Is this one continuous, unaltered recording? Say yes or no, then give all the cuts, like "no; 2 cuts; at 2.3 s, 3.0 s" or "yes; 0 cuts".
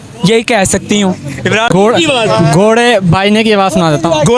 no; 1 cut; at 1.7 s